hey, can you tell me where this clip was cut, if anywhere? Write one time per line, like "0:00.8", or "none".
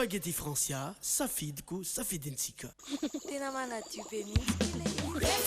0:02.6